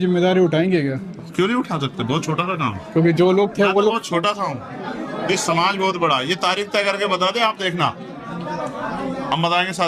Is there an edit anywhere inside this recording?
no; 0 cuts

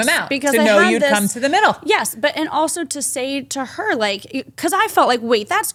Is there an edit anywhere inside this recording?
no; 0 cuts

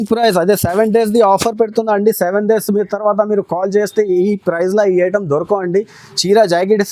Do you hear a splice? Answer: no; 0 cuts

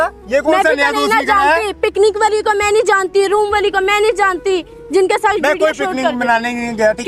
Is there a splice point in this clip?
no; 0 cuts

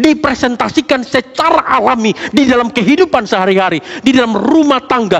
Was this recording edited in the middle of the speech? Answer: no; 0 cuts

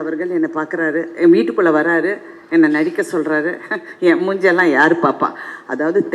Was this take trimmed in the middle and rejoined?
no; 0 cuts

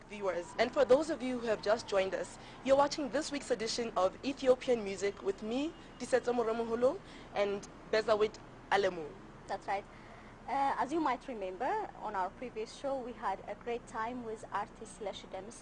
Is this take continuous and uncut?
yes; 0 cuts

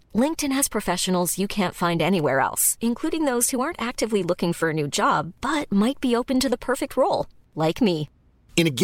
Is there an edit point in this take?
no; 0 cuts

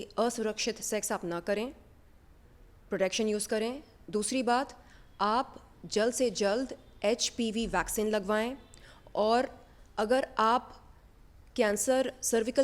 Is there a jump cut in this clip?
no; 0 cuts

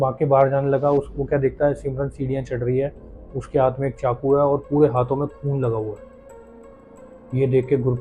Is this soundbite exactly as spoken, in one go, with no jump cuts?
yes; 0 cuts

